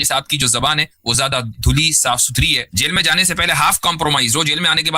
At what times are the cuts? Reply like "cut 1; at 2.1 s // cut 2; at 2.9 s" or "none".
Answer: cut 1; at 2.7 s